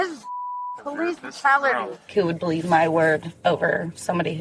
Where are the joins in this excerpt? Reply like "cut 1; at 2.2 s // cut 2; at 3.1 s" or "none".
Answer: cut 1; at 2.1 s // cut 2; at 3.3 s

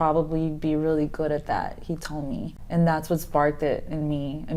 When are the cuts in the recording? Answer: cut 1; at 2.6 s

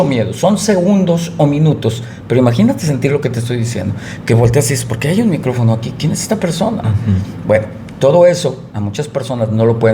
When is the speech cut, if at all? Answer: none

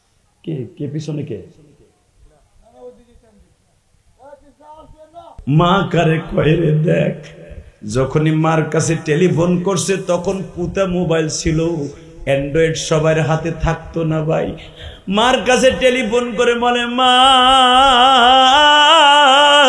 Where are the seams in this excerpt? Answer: cut 1; at 5.2 s

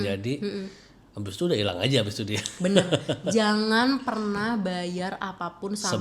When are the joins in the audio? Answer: none

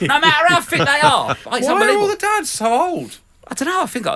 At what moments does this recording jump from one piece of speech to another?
cut 1; at 1.4 s

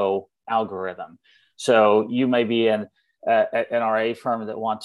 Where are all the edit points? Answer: none

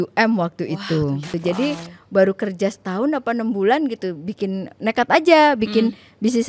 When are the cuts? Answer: cut 1; at 1.3 s

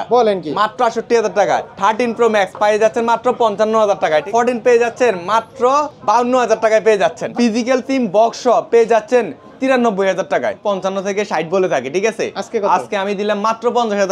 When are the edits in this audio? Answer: cut 1; at 1.7 s // cut 2; at 4.3 s // cut 3; at 5.9 s // cut 4; at 7.3 s // cut 5; at 10.6 s

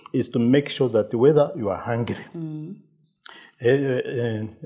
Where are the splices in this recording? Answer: none

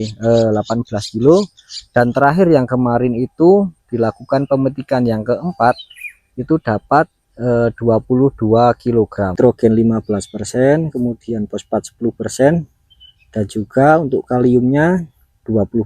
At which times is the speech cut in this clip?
cut 1; at 9.4 s

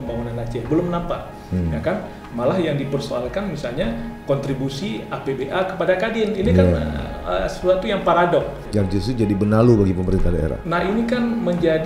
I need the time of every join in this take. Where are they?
cut 1; at 8.6 s

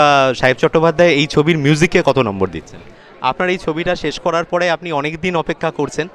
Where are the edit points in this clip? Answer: cut 1; at 2.9 s

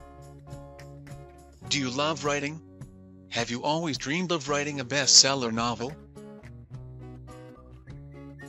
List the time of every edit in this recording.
cut 1; at 1.7 s // cut 2; at 5.9 s // cut 3; at 7.6 s

